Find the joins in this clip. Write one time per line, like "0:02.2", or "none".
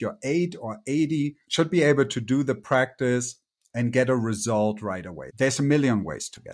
0:01.4
0:05.2